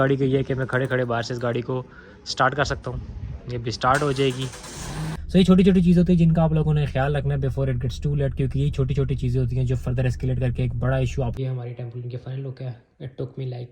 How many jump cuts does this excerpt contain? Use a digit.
2